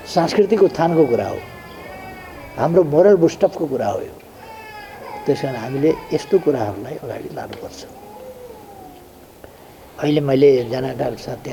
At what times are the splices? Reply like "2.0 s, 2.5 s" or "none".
none